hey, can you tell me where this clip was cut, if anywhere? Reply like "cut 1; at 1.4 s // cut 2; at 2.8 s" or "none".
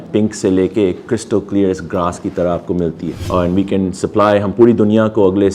cut 1; at 3.1 s